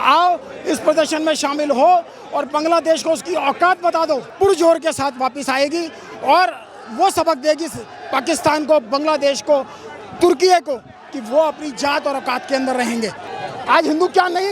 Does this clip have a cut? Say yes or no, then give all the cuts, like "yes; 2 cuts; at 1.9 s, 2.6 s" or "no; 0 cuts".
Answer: yes; 2 cuts; at 4.3 s, 13.2 s